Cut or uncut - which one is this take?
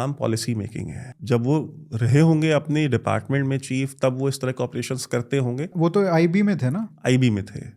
cut